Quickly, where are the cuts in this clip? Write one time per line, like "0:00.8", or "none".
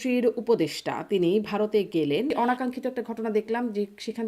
0:02.3